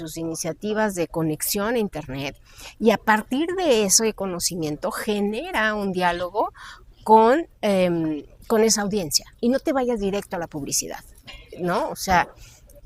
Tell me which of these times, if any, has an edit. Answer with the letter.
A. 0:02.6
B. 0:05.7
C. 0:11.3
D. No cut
D